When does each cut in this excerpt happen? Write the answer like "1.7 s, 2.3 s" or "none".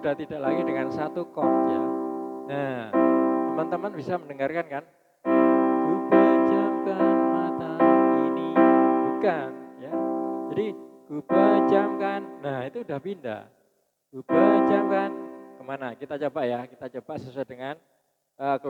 none